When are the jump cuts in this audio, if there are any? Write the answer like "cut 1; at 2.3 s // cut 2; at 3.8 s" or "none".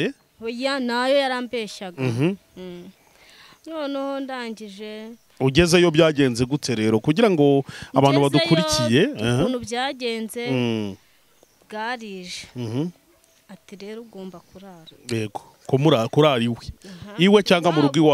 none